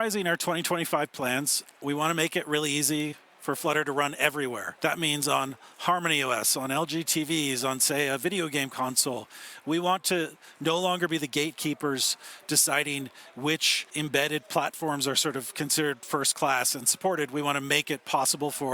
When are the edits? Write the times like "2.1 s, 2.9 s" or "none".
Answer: 1.8 s, 4.7 s, 13.8 s